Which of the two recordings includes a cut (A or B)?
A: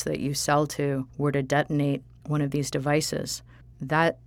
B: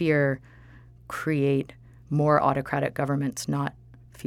A